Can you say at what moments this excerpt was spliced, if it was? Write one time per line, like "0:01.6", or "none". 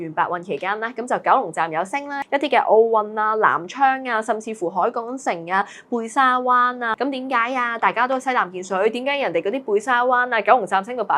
0:02.2
0:06.9